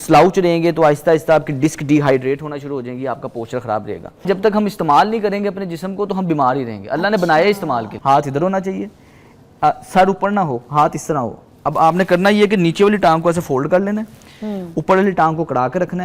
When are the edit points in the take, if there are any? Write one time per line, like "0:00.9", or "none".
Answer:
0:04.3
0:07.9